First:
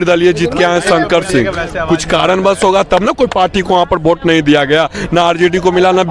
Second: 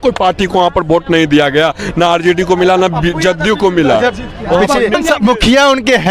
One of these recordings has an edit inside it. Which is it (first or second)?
second